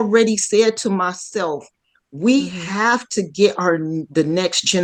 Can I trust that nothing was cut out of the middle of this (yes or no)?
yes